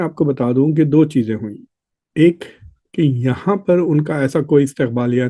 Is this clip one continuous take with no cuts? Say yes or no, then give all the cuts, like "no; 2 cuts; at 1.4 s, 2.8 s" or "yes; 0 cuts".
yes; 0 cuts